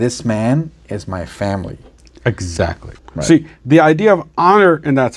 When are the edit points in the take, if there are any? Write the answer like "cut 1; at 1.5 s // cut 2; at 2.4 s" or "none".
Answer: cut 1; at 2.9 s